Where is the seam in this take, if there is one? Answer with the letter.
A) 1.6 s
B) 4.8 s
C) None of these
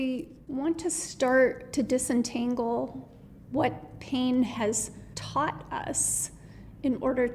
A